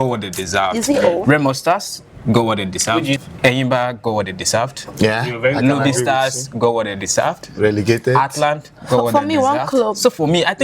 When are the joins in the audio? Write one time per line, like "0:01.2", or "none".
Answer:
0:03.2